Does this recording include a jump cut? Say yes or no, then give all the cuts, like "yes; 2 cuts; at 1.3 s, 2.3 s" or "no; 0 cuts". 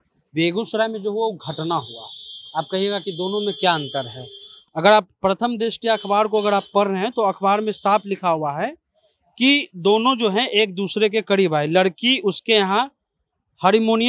no; 0 cuts